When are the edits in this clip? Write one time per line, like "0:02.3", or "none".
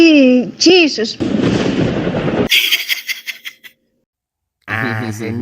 0:01.0